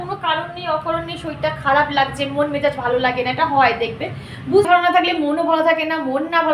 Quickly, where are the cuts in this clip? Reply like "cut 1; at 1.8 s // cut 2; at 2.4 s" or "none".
cut 1; at 4.7 s